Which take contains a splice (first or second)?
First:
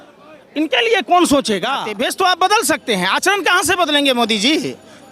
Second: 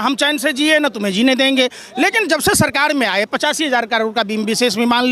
first